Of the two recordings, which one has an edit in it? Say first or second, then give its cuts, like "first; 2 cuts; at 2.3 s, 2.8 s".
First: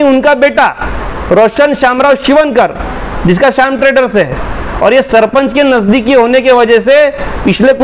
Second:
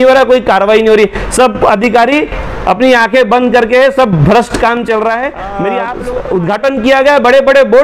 second; 1 cut; at 5.9 s